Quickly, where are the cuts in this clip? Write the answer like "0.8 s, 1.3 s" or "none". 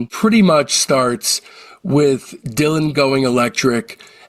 none